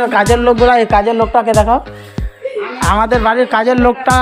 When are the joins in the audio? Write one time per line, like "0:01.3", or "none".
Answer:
none